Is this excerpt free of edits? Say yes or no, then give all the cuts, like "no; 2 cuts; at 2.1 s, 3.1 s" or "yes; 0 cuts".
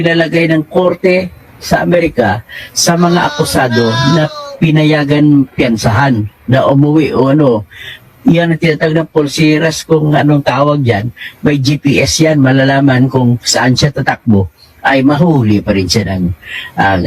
yes; 0 cuts